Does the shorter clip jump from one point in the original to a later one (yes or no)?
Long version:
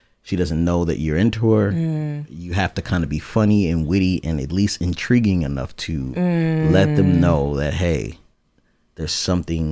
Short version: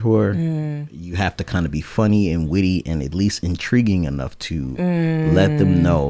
no